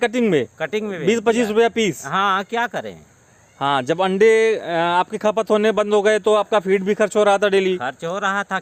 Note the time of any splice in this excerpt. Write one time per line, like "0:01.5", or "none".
none